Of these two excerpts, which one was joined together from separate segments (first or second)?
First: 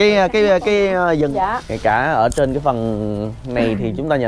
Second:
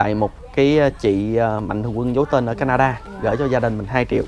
first